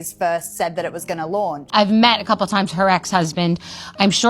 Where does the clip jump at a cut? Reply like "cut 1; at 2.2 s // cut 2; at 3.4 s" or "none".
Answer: cut 1; at 1.6 s